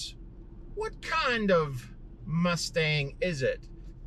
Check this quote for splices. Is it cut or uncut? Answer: uncut